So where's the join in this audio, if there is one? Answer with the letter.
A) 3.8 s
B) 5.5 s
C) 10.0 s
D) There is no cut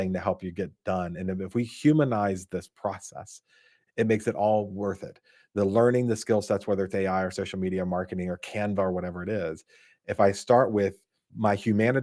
A